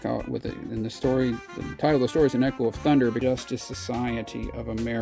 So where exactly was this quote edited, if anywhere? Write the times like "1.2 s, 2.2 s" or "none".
3.2 s